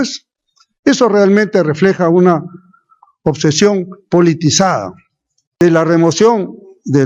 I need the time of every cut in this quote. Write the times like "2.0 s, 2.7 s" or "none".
5.6 s

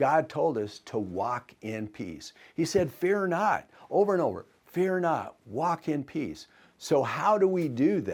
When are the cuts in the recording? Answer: none

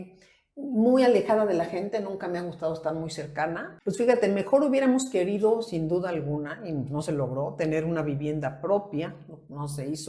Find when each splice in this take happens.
3.7 s

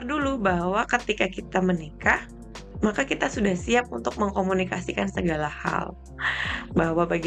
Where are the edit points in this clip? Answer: none

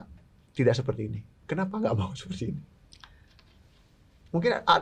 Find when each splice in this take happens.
none

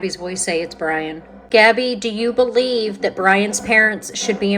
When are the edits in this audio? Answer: 1.3 s

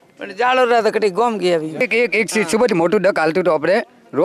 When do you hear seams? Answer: 1.8 s

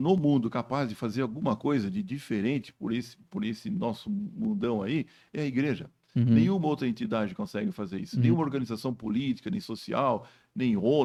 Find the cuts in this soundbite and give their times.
none

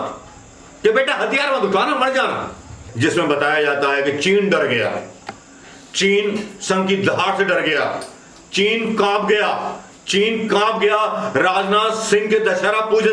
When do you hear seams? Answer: 2.9 s

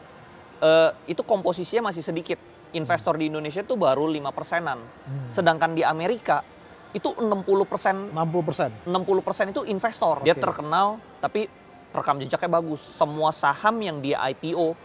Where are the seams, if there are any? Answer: 10.2 s

